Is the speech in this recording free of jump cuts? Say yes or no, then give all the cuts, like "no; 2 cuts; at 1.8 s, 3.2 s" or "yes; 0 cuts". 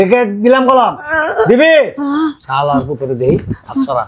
yes; 0 cuts